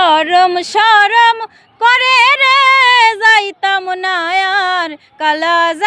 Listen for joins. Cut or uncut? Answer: uncut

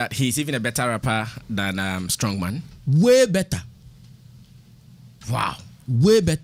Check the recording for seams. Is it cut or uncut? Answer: uncut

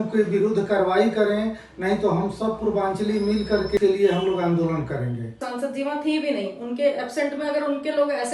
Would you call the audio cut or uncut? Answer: cut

